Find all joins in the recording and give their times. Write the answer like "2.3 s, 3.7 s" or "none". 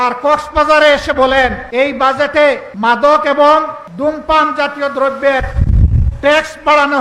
1.6 s, 2.7 s, 3.8 s